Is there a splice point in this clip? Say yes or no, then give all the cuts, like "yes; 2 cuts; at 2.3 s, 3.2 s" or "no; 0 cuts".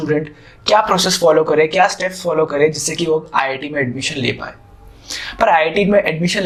no; 0 cuts